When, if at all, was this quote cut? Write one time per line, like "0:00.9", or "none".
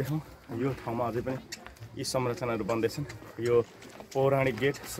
none